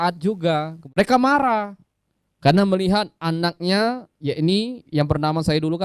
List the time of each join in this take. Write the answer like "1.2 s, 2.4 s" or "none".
1.0 s